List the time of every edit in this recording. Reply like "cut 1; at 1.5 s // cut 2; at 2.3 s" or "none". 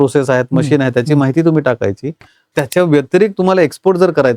cut 1; at 2.5 s